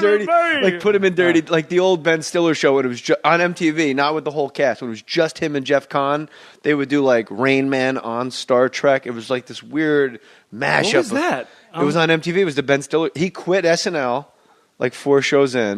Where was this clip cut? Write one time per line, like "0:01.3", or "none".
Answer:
0:13.6